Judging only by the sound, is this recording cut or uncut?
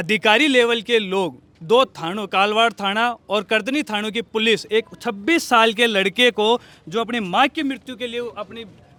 uncut